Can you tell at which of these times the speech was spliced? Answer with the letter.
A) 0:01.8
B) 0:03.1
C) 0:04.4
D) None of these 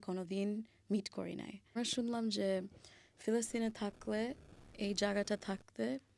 A